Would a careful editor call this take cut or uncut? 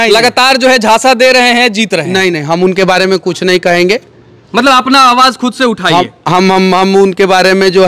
uncut